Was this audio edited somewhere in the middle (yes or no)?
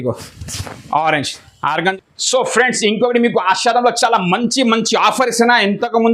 yes